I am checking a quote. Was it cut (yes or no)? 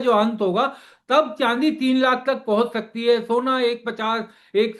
no